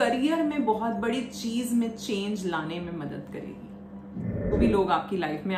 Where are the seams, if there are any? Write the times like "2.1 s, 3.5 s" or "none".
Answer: 4.5 s